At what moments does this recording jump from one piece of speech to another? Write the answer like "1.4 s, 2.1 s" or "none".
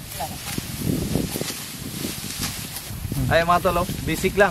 3.0 s